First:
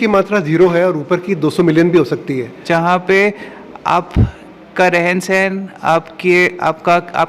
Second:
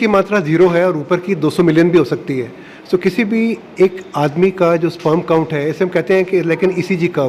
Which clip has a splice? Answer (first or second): first